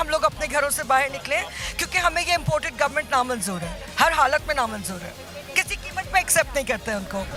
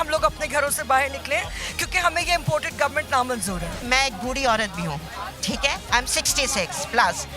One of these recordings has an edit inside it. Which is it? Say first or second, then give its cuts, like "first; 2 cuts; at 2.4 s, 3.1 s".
second; 1 cut; at 3.8 s